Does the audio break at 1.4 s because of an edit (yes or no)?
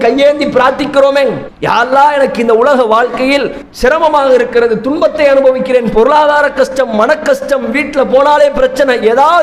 yes